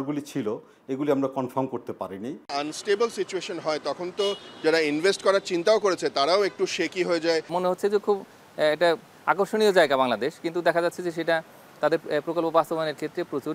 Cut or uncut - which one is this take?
cut